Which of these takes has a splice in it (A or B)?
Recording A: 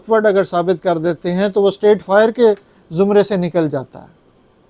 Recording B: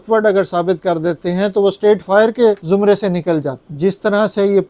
B